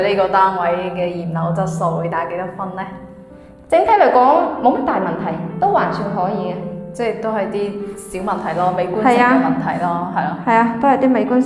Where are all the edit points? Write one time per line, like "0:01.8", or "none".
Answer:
none